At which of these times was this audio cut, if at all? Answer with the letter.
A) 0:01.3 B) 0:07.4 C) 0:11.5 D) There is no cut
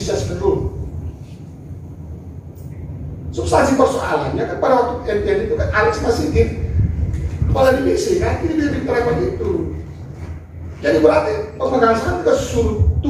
D